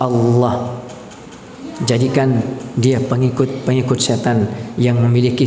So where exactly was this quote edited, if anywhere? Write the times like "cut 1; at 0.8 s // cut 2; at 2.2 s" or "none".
none